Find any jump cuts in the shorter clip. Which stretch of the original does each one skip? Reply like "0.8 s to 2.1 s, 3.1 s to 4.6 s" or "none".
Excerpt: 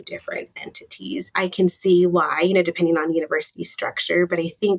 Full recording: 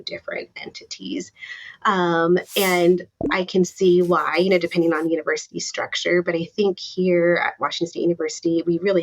1.4 s to 3.3 s

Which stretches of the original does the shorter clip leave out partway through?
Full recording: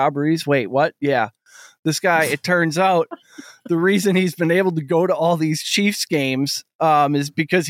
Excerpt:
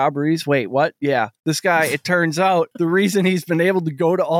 1.3 s to 1.7 s, 3.1 s to 3.6 s

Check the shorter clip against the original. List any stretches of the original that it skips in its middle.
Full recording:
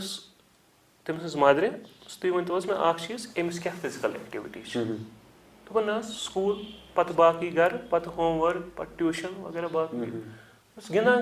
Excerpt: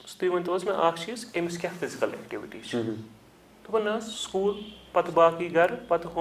none

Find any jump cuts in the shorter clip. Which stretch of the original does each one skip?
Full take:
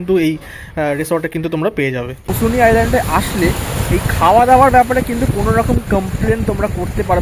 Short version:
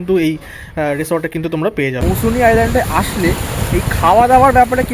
2.0 s to 2.2 s

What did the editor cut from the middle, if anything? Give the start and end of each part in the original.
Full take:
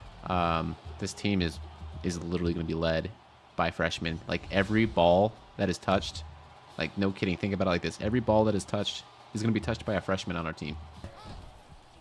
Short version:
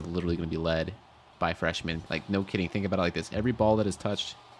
4.2 s to 6.7 s

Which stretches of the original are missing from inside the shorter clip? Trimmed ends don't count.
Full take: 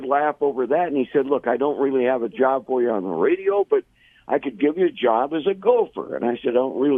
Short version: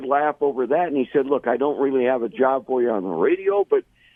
none

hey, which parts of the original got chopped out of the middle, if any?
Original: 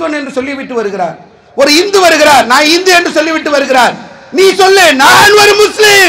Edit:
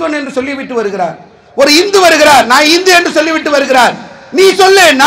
none

